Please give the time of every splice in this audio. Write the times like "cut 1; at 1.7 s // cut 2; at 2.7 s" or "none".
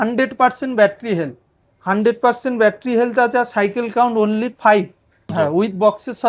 cut 1; at 5.3 s

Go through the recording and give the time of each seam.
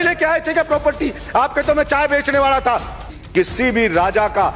cut 1; at 3.1 s

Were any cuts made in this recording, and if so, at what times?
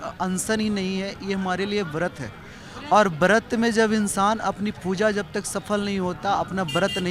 none

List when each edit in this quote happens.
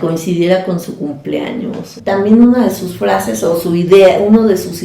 cut 1; at 1.9 s

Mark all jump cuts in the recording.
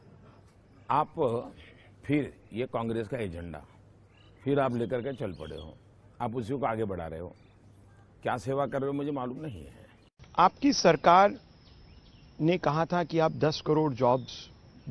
cut 1; at 10.0 s

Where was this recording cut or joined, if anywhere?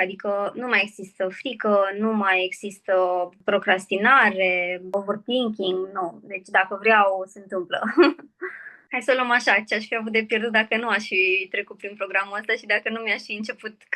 cut 1; at 3.4 s // cut 2; at 4.9 s // cut 3; at 8.8 s

